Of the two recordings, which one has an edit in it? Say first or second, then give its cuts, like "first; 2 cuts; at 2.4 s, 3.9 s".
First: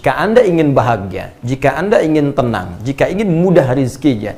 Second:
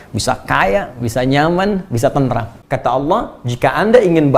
second; 1 cut; at 2.6 s